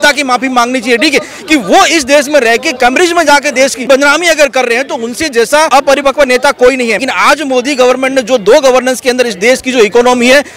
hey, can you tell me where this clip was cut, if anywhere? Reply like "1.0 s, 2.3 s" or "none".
3.9 s, 5.7 s, 7.0 s